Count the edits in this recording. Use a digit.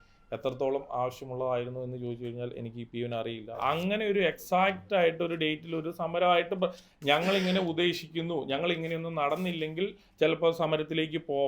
1